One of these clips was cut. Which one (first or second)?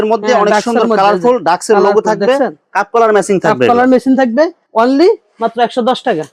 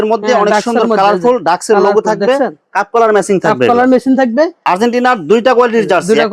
second